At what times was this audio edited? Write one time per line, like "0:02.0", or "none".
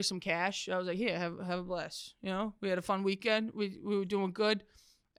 none